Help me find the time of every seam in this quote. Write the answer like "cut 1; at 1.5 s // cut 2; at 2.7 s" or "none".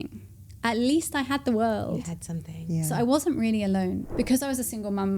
cut 1; at 4.0 s